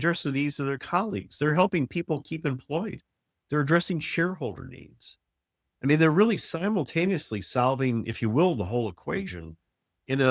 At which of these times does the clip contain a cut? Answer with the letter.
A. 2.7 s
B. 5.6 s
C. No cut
C